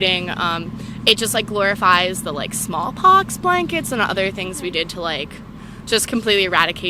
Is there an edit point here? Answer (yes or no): no